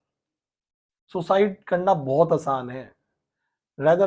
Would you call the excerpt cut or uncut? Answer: uncut